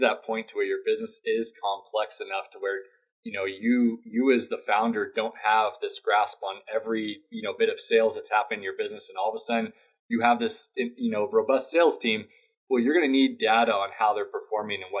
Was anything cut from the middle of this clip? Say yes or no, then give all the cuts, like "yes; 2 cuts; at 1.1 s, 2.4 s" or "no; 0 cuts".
no; 0 cuts